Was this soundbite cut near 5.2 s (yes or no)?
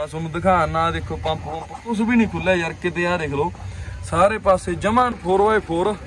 yes